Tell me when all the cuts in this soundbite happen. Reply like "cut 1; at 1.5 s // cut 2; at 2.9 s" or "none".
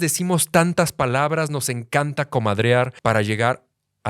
cut 1; at 2.9 s